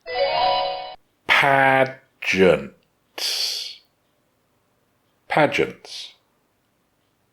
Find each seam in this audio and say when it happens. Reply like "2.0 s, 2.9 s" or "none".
0.9 s